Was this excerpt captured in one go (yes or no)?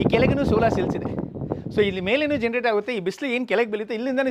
yes